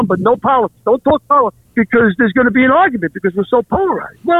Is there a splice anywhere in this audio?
yes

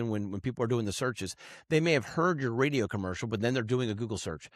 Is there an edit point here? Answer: no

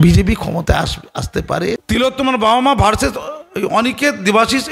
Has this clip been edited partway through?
yes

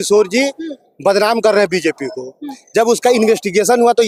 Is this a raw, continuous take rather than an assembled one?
yes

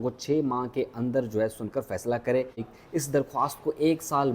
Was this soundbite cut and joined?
yes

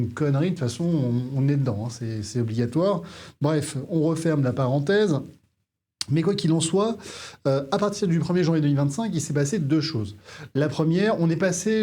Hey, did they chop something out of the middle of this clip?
no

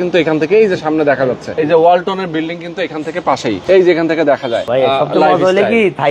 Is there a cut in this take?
yes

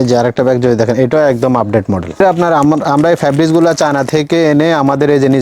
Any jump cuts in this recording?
yes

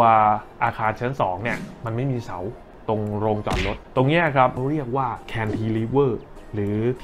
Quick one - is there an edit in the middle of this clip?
yes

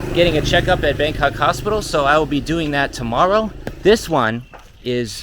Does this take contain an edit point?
yes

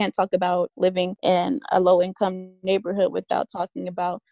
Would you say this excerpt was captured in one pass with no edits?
no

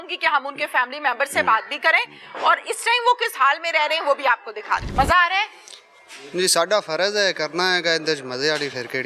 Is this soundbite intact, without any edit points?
no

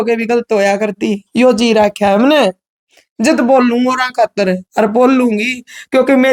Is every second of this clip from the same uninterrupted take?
yes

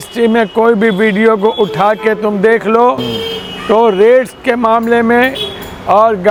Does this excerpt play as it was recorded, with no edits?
yes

